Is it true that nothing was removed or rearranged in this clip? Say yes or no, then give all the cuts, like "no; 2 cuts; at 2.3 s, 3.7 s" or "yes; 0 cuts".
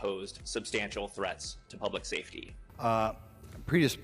no; 1 cut; at 2.7 s